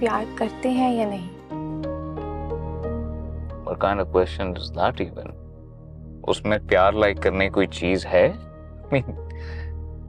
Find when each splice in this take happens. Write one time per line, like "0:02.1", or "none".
none